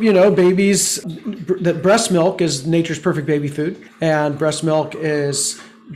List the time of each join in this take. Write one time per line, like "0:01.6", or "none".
0:01.0
0:03.8